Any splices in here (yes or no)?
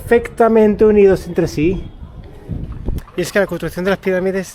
yes